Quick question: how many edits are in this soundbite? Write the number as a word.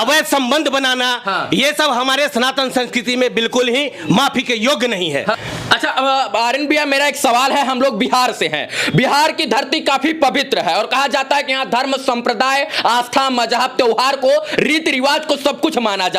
zero